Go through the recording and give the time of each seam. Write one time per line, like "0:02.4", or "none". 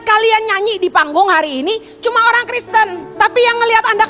0:03.0